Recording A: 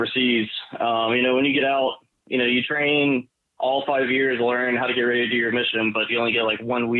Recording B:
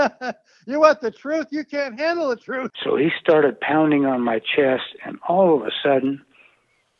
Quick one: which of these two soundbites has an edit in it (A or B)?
B